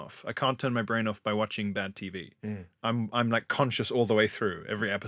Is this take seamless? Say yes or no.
yes